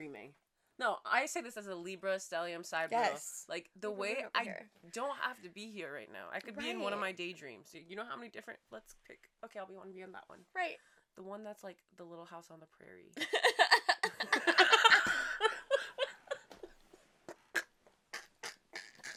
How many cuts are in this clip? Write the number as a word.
zero